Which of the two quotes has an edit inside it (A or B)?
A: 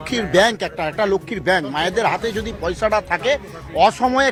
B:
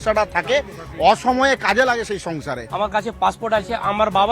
B